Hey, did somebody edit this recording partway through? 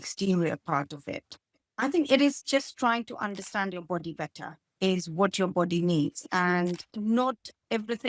yes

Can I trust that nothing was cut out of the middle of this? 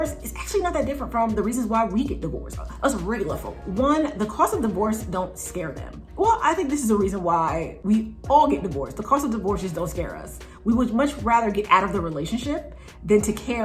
yes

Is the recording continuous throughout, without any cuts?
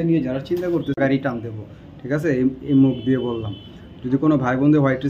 no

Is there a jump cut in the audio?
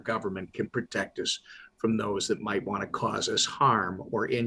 no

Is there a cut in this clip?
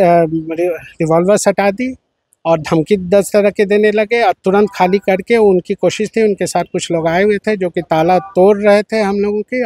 no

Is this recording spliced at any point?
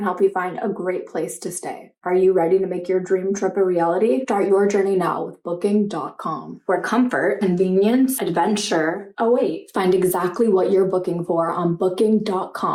no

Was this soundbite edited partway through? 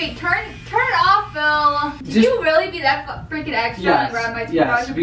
yes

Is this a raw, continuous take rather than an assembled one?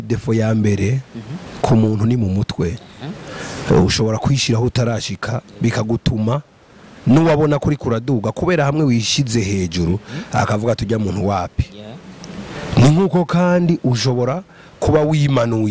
yes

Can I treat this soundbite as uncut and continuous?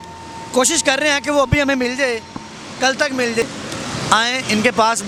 yes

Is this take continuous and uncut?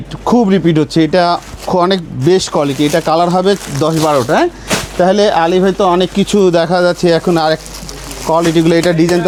yes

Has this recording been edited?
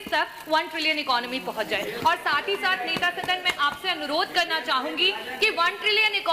no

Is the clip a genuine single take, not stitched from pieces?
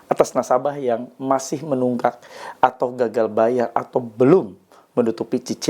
yes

